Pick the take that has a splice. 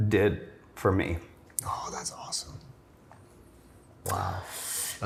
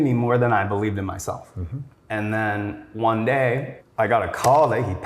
second; 2 cuts; at 2.0 s, 3.8 s

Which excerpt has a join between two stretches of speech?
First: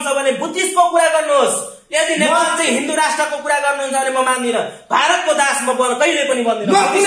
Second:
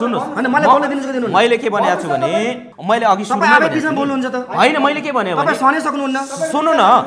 second; 1 cut; at 2.7 s

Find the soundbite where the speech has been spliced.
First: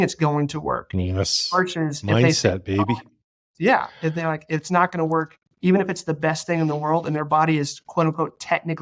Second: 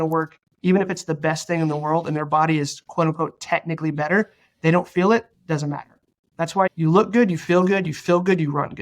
second; 1 cut; at 6.7 s

